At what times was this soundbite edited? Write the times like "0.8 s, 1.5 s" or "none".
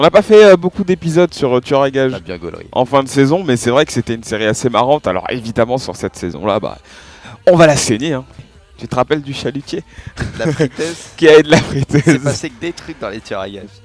7.4 s